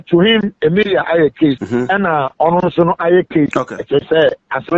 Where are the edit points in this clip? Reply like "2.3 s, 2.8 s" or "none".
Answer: 1.6 s, 3.6 s